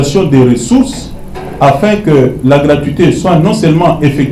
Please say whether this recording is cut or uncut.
uncut